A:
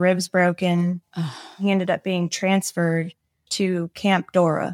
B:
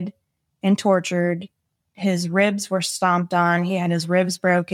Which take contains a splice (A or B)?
A